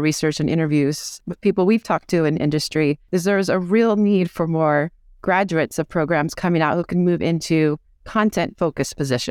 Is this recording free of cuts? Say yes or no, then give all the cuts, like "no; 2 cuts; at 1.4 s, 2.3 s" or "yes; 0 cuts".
no; 2 cuts; at 1.2 s, 3.0 s